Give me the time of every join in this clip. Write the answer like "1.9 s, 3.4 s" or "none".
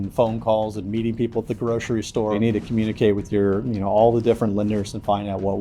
2.3 s